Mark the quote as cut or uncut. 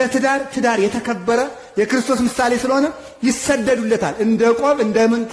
uncut